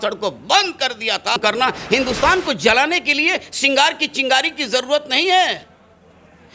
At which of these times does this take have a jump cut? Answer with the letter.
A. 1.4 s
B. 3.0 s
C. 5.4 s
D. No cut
A